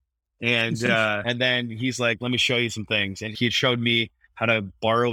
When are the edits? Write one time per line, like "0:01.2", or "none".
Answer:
0:03.3